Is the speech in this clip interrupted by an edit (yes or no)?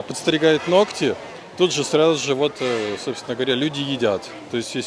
no